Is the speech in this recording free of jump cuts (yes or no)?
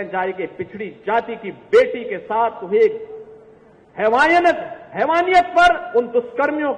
yes